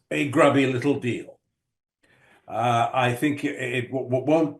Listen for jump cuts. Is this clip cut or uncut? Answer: uncut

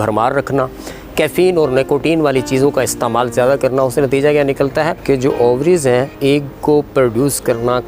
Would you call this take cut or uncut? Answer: cut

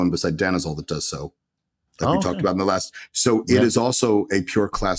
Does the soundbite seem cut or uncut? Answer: uncut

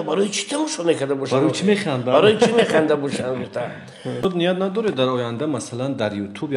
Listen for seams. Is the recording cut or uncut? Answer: cut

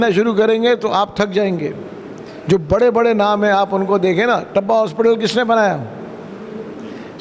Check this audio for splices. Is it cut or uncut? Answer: uncut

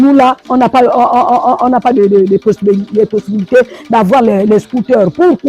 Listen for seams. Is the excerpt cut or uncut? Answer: uncut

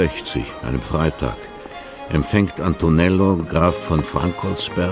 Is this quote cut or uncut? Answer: uncut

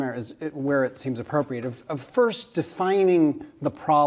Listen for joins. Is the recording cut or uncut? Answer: cut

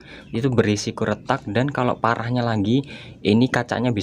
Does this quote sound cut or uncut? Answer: uncut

